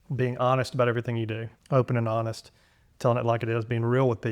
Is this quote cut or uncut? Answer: cut